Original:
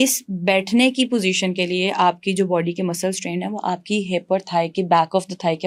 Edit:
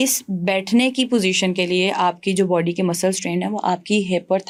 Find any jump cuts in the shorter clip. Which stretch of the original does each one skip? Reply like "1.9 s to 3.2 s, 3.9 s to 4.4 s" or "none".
none